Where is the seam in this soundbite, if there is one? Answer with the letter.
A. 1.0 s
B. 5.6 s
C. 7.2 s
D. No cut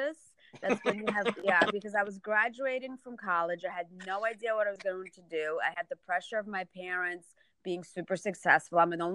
D